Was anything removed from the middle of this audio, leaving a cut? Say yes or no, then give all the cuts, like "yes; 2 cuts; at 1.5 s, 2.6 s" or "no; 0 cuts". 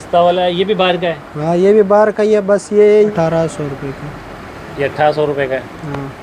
yes; 1 cut; at 3.1 s